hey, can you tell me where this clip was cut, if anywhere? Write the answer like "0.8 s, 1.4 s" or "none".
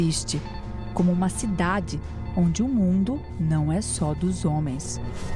none